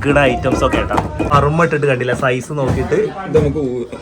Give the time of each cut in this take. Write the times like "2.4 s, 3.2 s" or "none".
1.3 s